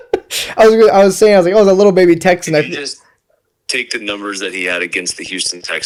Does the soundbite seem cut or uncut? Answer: uncut